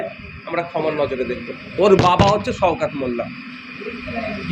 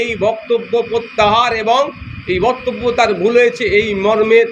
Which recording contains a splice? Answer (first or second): first